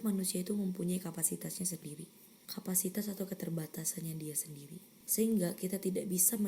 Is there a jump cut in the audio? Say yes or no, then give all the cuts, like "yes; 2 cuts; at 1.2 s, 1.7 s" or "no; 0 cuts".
no; 0 cuts